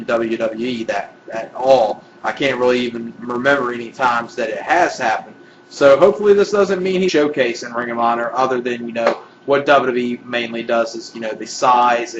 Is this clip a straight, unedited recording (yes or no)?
yes